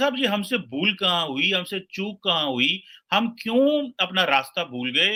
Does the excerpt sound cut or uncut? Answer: uncut